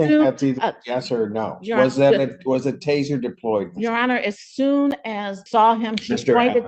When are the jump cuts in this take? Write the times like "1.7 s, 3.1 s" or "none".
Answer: 5.4 s